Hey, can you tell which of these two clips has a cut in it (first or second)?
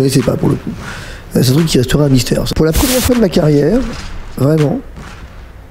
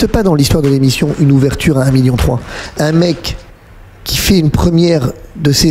first